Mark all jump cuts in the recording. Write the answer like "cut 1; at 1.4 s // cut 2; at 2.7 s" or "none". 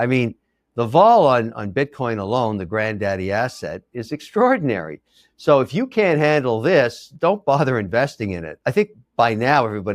cut 1; at 8.5 s